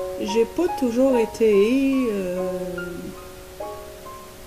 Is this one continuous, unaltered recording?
no; 1 cut; at 1.0 s

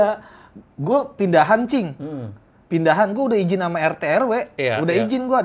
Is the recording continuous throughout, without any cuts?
yes; 0 cuts

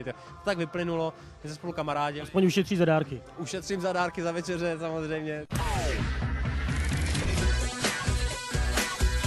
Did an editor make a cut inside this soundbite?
yes; 1 cut; at 5.5 s

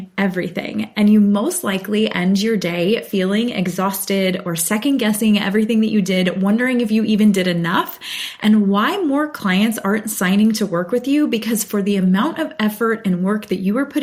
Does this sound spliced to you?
no; 0 cuts

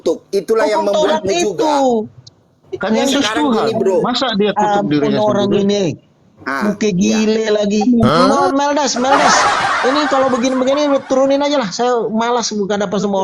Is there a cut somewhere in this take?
yes; 1 cut; at 8.1 s

